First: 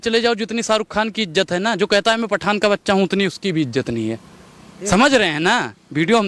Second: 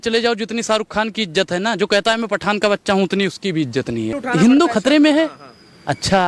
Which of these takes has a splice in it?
second; 1 cut; at 4.2 s

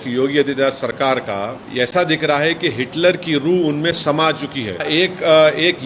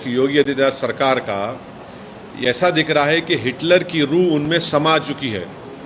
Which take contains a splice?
first; 2 cuts; at 1.6 s, 4.8 s

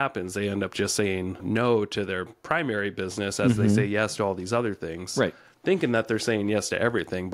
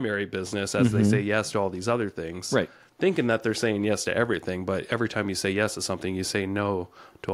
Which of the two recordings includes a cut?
first; 1 cut; at 1.4 s

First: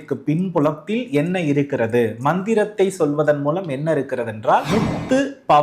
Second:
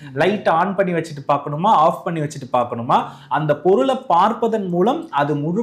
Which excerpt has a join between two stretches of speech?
first; 1 cut; at 4.7 s

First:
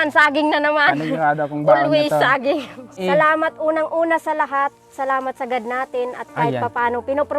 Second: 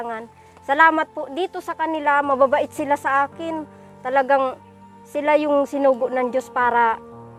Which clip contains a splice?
first; 1 cut; at 2.9 s

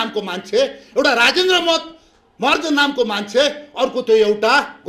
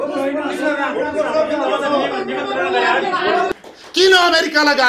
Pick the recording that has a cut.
second; 1 cut; at 3.5 s

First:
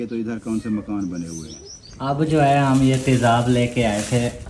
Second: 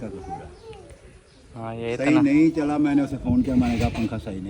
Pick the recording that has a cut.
first; 1 cut; at 2.0 s

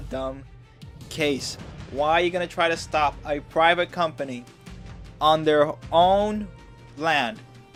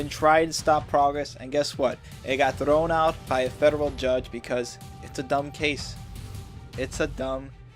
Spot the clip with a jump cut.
second; 1 cut; at 4.4 s

